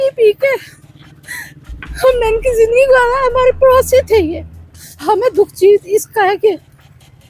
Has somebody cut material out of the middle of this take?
yes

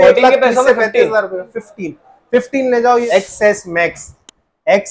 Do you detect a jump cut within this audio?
yes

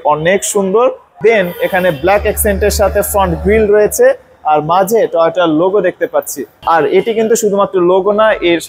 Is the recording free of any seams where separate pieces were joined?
yes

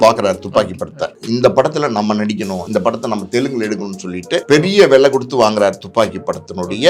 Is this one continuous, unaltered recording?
no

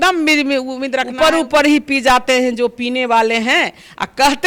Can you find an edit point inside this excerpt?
yes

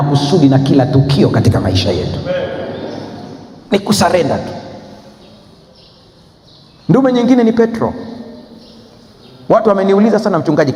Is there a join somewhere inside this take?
no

